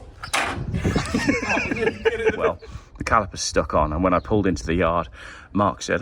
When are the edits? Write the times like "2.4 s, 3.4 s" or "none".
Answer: 2.5 s